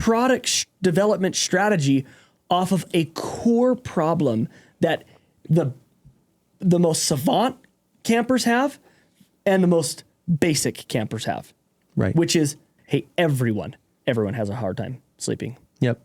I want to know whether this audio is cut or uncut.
cut